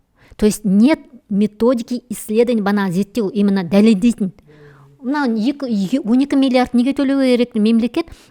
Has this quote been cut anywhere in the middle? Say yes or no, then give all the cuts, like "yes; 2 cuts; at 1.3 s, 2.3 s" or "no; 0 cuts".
no; 0 cuts